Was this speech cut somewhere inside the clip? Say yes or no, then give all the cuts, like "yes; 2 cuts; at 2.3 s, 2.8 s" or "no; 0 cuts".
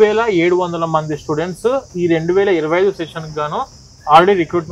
no; 0 cuts